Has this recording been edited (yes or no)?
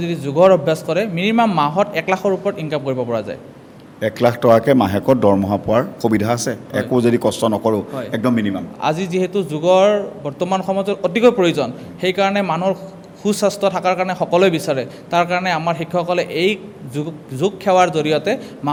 no